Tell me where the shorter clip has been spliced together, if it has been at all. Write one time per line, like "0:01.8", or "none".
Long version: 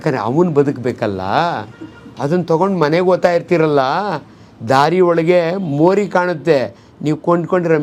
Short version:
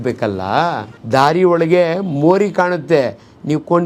0:00.9